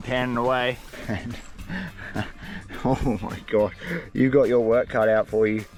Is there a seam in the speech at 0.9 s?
no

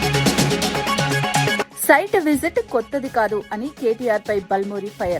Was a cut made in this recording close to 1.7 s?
yes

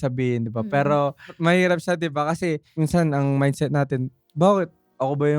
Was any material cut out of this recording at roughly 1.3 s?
yes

